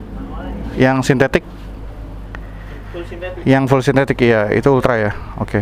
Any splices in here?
no; 0 cuts

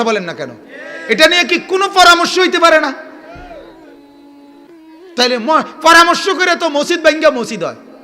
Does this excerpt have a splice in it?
yes; 2 cuts; at 3.6 s, 5.1 s

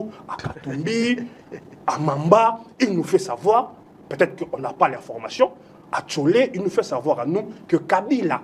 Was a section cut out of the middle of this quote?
no; 0 cuts

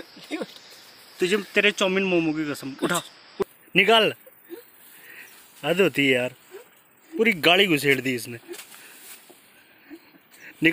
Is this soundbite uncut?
no; 1 cut; at 3.4 s

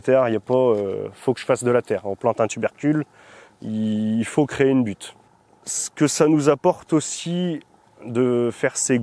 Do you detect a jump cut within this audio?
no; 0 cuts

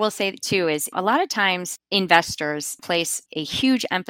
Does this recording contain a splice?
yes; 2 cuts; at 0.9 s, 3.1 s

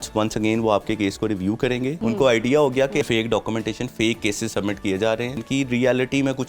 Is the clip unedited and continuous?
no; 3 cuts; at 2.0 s, 3.0 s, 5.4 s

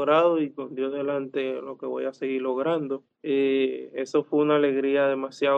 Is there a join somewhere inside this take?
yes; 1 cut; at 3.1 s

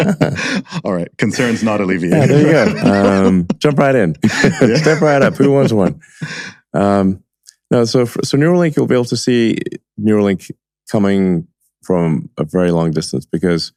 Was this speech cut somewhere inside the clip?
no; 0 cuts

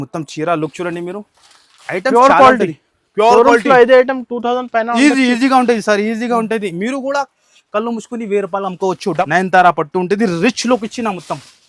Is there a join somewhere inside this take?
yes; 1 cut; at 9.2 s

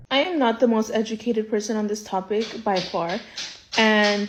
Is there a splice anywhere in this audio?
no; 0 cuts

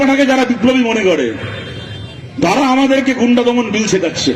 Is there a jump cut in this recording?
no; 0 cuts

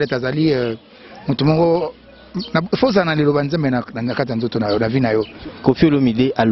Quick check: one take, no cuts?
no; 1 cut; at 5.4 s

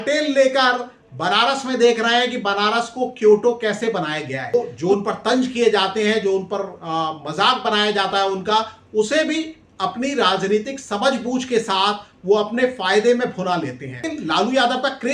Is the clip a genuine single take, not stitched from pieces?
no; 2 cuts; at 4.5 s, 14.1 s

